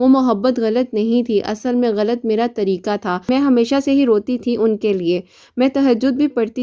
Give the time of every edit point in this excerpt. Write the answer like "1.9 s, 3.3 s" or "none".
3.3 s